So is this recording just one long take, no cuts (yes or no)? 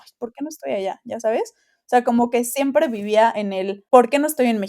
no